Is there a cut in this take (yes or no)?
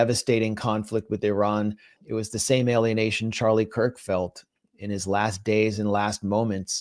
yes